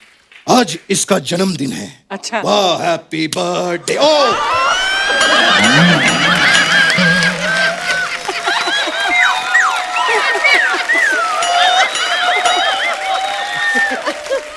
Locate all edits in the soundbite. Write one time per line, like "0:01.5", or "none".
none